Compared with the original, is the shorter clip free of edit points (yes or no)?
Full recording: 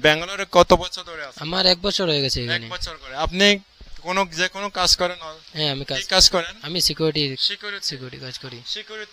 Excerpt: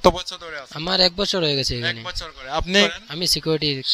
no